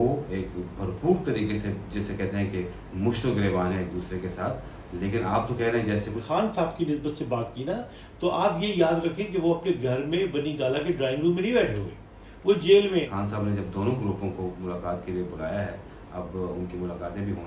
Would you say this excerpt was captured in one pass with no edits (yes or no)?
no